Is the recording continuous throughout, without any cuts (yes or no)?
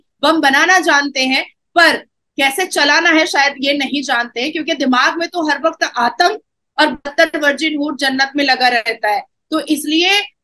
yes